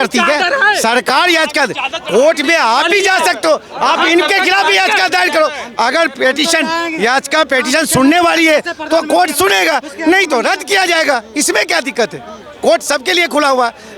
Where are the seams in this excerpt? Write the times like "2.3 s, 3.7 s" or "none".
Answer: none